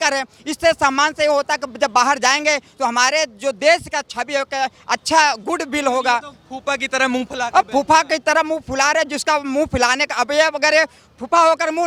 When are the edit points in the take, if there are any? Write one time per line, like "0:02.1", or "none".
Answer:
none